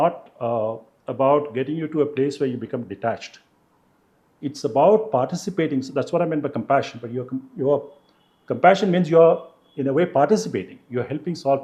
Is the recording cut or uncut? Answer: uncut